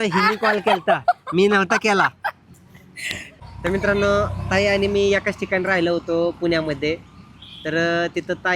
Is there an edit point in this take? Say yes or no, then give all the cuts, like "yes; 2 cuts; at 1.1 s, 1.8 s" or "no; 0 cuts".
yes; 1 cut; at 3.3 s